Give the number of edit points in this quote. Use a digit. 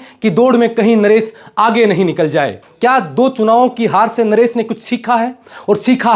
1